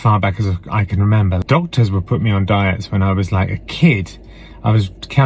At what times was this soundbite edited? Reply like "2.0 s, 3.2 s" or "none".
1.4 s